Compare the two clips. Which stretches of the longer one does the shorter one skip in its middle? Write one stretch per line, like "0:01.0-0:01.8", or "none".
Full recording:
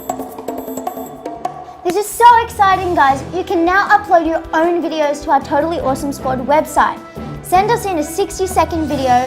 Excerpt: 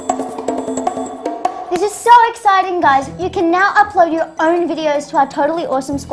0:01.6-0:01.8